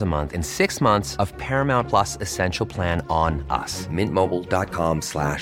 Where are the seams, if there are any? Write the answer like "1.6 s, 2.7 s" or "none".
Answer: none